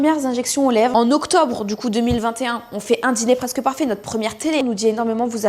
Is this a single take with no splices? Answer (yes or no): no